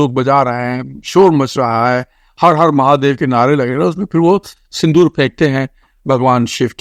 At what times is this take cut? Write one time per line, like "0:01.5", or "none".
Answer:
none